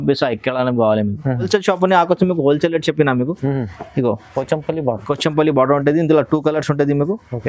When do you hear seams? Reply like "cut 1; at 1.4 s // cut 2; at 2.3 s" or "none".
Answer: cut 1; at 1.5 s